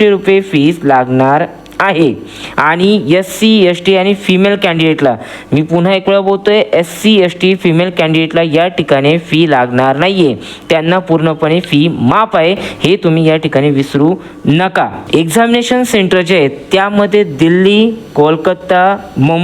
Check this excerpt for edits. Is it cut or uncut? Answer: uncut